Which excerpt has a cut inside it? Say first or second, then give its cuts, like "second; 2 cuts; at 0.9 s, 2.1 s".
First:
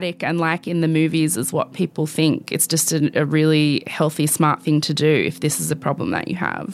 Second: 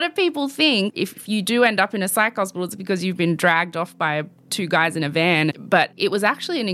second; 3 cuts; at 0.9 s, 4.4 s, 6.0 s